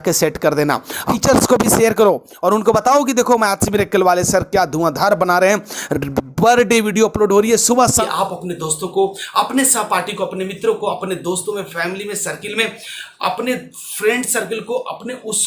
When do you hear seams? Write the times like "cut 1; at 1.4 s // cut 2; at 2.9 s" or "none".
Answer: cut 1; at 1.1 s // cut 2; at 8.0 s